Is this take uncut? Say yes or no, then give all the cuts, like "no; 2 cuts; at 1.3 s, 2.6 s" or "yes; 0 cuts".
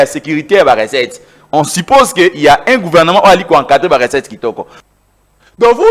no; 1 cut; at 4.8 s